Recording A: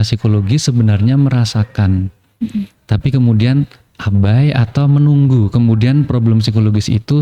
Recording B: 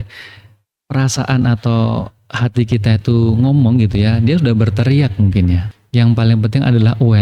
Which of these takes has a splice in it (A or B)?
B